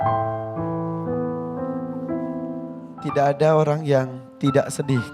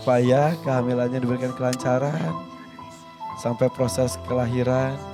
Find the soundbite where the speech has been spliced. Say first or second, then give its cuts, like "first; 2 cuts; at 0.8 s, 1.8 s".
first; 1 cut; at 2.9 s